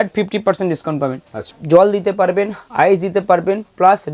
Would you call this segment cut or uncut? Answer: cut